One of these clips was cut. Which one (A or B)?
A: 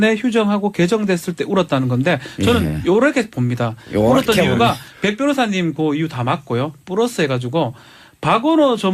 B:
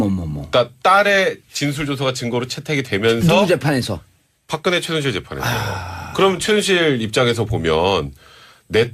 A